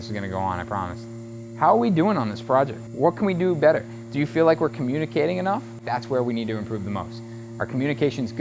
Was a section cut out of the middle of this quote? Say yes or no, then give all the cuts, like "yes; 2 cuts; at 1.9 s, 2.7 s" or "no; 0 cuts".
yes; 2 cuts; at 2.8 s, 5.9 s